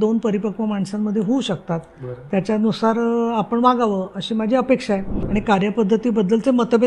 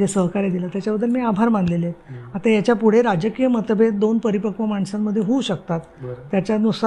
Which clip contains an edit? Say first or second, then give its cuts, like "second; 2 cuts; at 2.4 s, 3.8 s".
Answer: first; 1 cut; at 5.1 s